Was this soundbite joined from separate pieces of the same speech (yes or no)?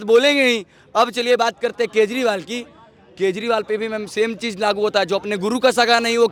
no